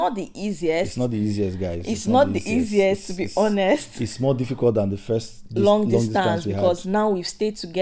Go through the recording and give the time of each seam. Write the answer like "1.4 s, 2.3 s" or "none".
none